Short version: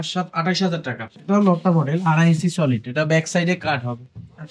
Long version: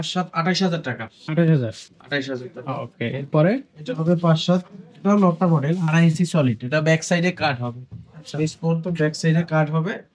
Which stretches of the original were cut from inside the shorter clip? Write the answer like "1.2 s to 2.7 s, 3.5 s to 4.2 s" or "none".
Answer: 1.1 s to 4.8 s